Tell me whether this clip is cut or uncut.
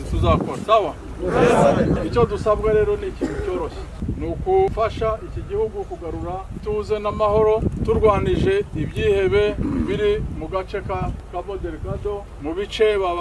uncut